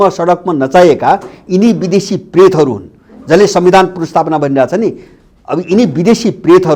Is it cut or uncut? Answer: uncut